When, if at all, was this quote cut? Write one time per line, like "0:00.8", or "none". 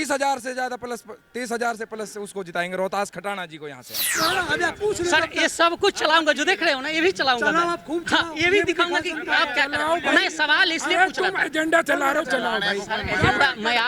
0:04.1